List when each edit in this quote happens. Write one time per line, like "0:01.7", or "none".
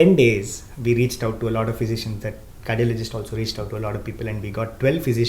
none